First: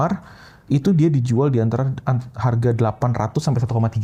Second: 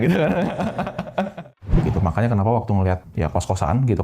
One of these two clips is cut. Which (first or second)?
second